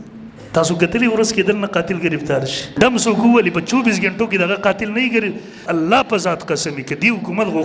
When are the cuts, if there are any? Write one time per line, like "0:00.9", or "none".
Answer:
0:02.7
0:05.6